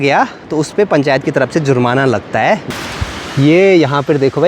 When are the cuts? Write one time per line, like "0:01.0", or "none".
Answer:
0:02.6